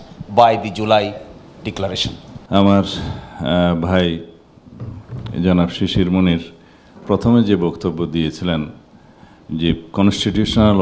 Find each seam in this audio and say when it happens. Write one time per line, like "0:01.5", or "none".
0:02.3